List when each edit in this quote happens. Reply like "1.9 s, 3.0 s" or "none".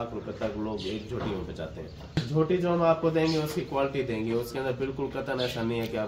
2.2 s